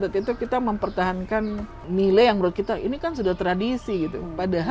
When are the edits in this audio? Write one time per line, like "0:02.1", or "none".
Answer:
0:01.8